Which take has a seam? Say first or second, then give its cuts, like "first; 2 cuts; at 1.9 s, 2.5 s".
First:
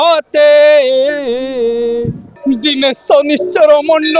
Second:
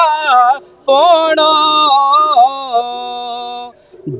first; 1 cut; at 2.3 s